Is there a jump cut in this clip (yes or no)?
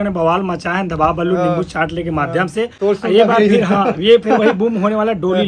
no